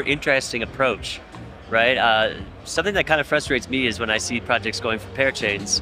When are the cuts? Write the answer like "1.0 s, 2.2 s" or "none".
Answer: none